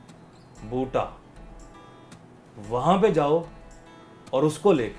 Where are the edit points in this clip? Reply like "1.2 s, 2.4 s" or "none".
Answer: none